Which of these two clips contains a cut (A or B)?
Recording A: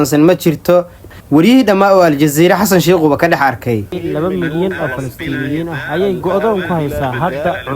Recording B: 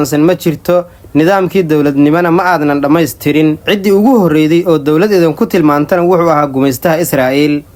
A